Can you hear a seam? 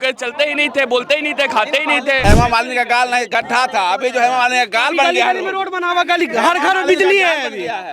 yes; 1 cut; at 2.2 s

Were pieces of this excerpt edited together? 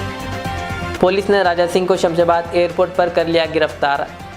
yes; 1 cut; at 0.9 s

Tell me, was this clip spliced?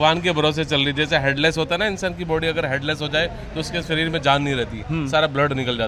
no; 0 cuts

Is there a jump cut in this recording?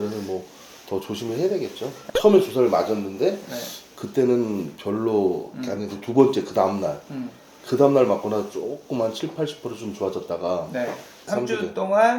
yes; 2 cuts; at 1.9 s, 11.3 s

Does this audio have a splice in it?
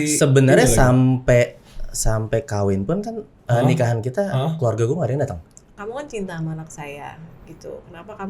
yes; 1 cut; at 5.6 s

